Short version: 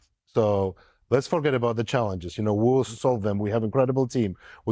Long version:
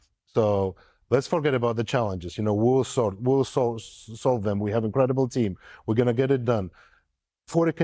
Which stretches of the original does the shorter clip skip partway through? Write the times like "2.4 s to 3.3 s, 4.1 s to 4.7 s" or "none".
2.9 s to 4.1 s